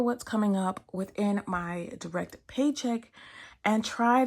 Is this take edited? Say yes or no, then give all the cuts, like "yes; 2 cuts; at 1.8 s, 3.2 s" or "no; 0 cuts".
no; 0 cuts